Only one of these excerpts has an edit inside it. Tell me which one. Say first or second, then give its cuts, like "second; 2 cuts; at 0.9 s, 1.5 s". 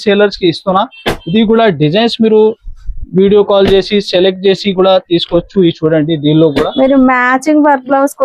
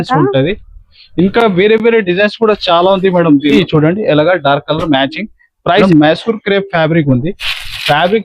second; 2 cuts; at 3.6 s, 5.8 s